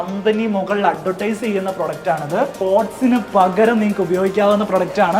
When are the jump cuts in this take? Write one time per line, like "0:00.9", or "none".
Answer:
0:02.5